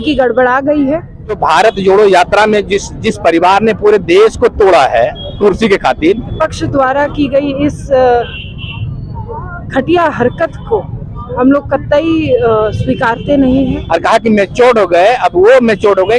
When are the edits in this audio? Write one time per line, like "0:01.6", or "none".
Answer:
0:01.4
0:06.4
0:13.8